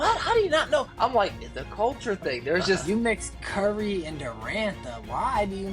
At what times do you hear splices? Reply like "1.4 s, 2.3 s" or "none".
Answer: 2.8 s